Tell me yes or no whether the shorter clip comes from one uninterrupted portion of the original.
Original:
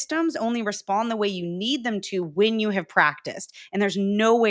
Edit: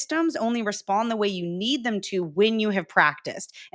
yes